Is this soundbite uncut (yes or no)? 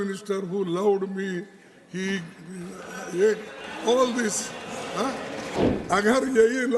no